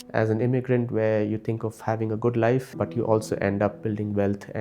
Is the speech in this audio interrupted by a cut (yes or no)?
yes